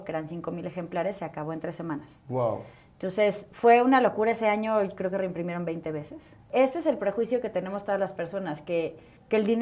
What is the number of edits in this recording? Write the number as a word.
one